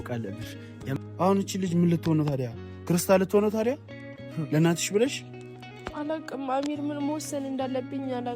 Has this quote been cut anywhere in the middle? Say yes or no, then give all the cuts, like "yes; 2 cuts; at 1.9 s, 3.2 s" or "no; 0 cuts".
yes; 1 cut; at 1.0 s